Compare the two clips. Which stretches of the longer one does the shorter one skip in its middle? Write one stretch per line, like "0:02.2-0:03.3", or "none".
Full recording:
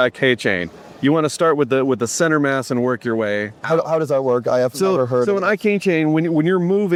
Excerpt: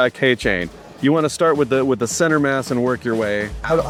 none

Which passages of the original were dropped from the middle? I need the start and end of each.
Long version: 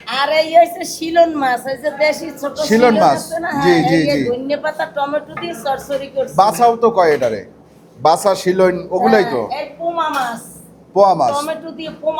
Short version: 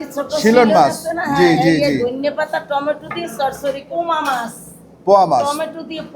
0:06.1-0:09.7

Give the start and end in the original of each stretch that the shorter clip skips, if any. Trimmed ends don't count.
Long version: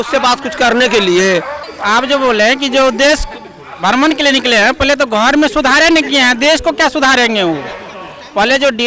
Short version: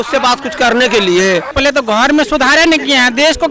0:01.5-0:04.8

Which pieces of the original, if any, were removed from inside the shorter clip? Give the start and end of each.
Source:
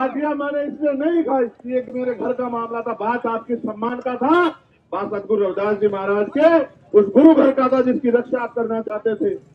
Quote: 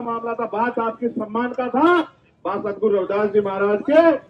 none

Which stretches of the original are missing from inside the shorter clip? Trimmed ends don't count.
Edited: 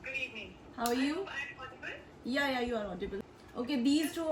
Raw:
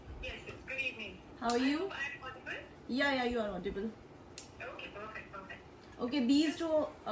0:04.0-0:05.8

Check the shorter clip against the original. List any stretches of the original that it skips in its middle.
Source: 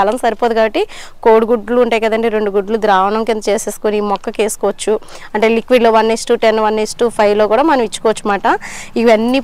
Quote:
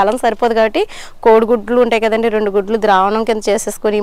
none

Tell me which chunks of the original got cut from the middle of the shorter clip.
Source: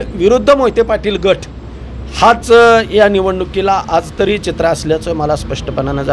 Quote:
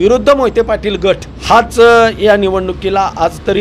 0:01.5-0:02.0

